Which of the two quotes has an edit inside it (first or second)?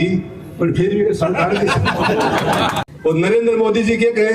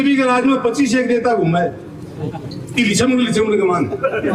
first